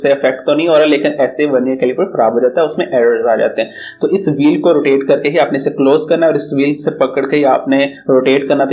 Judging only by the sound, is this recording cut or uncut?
uncut